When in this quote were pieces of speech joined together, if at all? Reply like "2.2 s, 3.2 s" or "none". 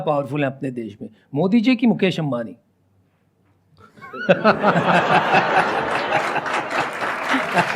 none